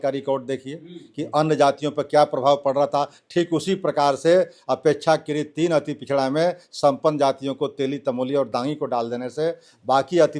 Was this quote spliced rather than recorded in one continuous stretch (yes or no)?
no